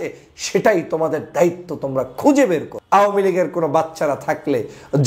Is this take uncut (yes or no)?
no